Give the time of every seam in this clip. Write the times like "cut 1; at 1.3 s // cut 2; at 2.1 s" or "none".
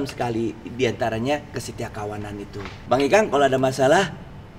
cut 1; at 2.7 s